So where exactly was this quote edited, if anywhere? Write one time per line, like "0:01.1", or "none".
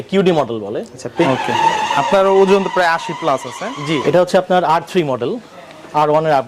0:01.2
0:04.0